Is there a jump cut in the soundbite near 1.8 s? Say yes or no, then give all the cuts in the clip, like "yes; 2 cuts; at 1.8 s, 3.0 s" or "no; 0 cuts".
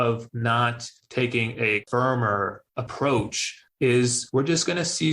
yes; 1 cut; at 1.8 s